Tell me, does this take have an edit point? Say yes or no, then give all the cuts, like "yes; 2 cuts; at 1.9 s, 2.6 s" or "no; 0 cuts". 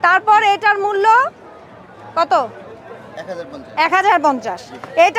no; 0 cuts